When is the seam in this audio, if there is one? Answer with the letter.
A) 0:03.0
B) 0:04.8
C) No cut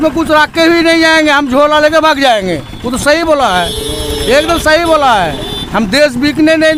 C